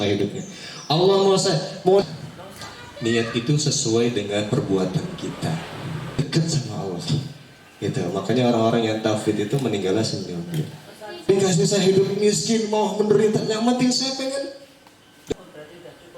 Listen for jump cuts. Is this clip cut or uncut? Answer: cut